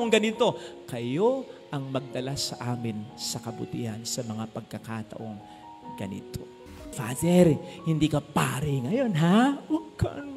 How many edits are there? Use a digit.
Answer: 1